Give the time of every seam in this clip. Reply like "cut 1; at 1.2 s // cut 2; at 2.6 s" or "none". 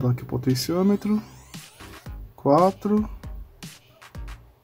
cut 1; at 3.1 s